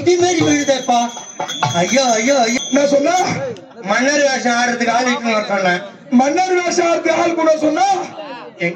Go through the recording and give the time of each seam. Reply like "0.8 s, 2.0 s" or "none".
2.6 s